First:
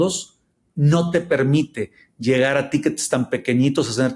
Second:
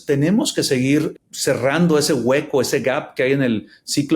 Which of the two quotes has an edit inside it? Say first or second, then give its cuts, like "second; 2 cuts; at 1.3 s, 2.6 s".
second; 1 cut; at 1.1 s